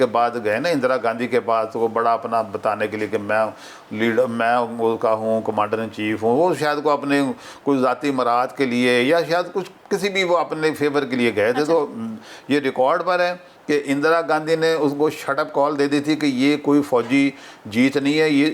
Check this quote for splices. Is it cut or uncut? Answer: uncut